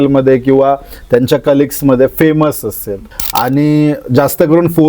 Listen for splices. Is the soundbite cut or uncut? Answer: cut